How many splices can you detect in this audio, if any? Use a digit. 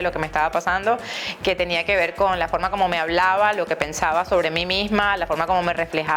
0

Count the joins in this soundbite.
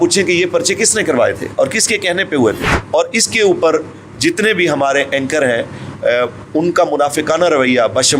1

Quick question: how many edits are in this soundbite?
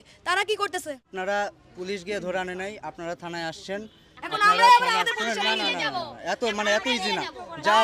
1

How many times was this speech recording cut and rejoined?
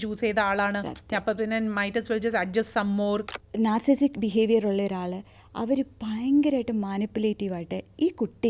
1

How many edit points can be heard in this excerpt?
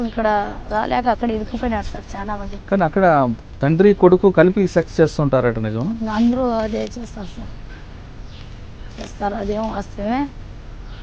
1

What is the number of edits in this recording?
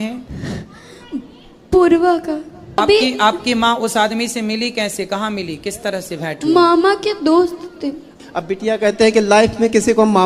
2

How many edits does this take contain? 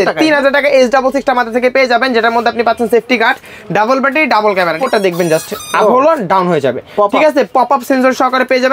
1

